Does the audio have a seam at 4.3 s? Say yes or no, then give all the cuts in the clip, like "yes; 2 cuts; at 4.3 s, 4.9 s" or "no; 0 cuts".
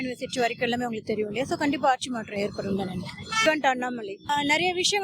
yes; 2 cuts; at 3.2 s, 4.3 s